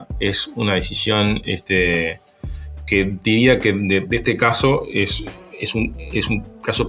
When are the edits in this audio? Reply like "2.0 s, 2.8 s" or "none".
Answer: none